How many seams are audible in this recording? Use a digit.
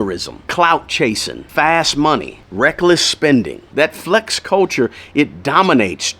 2